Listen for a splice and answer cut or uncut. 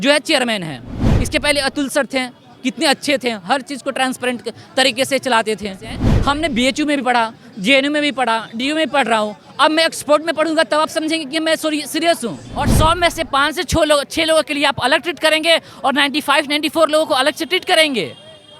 cut